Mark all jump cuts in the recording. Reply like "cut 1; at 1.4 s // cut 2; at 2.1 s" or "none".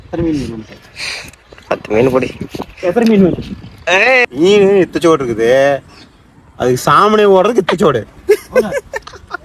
cut 1; at 4.3 s